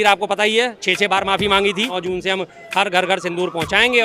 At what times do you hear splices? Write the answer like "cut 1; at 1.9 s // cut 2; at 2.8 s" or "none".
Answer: cut 1; at 2.0 s